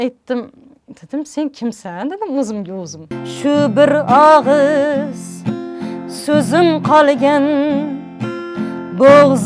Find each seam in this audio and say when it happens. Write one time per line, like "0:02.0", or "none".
0:03.1